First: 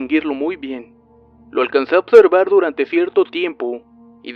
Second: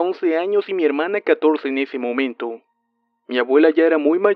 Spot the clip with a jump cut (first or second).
first